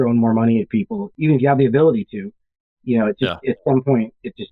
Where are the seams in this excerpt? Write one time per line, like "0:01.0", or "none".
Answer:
0:01.1